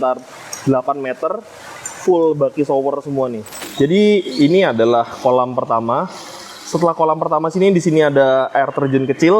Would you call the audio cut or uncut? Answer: cut